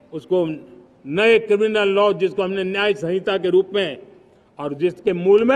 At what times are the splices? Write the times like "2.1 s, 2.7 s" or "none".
none